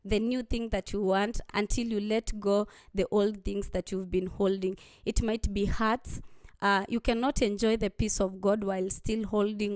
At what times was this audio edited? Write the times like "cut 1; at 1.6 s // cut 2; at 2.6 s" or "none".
cut 1; at 1.5 s